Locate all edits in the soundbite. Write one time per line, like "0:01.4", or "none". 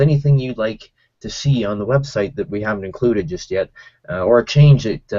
0:01.8